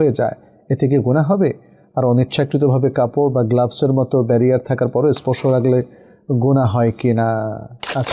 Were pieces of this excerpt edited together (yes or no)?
no